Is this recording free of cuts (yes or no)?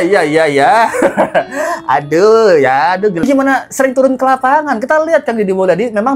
no